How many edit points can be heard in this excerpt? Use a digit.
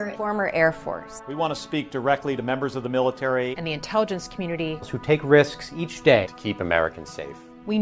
1